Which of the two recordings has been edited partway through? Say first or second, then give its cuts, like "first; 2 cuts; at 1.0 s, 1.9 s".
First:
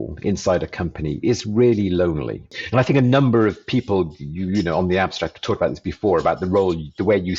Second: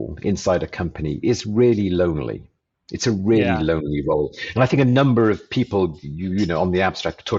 first; 1 cut; at 2.6 s